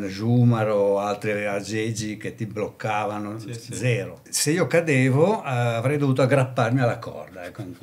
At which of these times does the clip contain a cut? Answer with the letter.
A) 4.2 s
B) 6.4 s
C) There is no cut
A